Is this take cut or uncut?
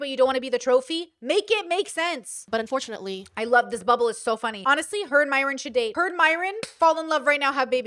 cut